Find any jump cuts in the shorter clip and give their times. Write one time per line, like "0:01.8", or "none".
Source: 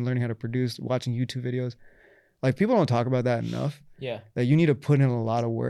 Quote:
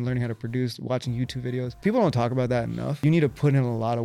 0:01.8
0:03.0